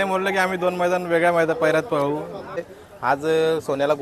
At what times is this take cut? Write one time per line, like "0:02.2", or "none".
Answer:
0:02.6